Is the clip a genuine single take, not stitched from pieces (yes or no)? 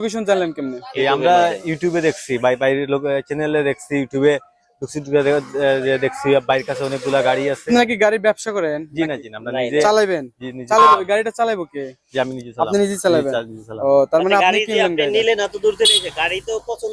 no